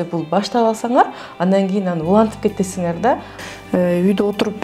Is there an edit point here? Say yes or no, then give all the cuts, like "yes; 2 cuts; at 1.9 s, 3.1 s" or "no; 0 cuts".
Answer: yes; 1 cut; at 3.3 s